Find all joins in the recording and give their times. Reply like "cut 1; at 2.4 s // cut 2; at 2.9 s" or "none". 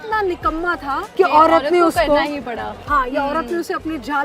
cut 1; at 1.0 s